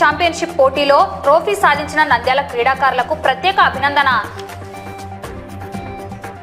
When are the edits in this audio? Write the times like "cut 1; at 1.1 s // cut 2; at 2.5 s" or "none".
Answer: cut 1; at 4.2 s